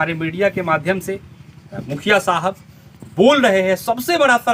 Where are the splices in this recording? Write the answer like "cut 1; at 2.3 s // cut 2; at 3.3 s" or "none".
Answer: none